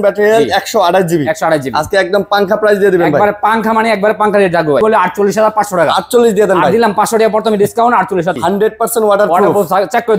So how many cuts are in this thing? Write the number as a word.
two